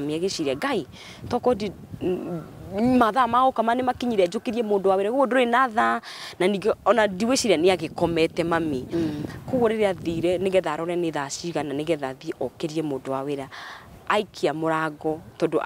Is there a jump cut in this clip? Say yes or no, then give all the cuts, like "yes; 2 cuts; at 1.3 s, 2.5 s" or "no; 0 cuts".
no; 0 cuts